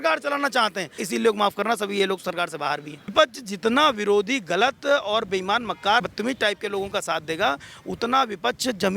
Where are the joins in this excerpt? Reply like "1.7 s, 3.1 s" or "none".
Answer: 0.9 s, 3.1 s